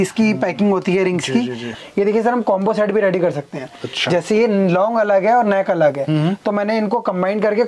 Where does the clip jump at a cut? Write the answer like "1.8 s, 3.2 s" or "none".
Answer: 1.8 s

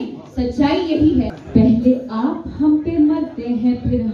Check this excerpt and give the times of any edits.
1.4 s

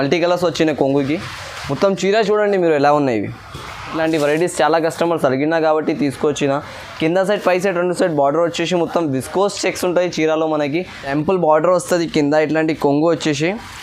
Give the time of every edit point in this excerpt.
3.9 s, 11.0 s

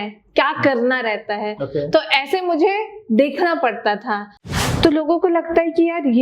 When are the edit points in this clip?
4.3 s

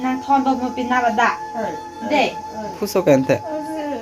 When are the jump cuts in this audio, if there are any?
2.8 s

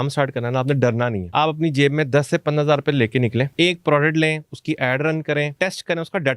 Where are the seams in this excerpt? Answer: 1.2 s, 3.5 s, 5.5 s

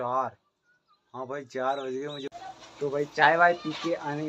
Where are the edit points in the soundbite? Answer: 2.3 s

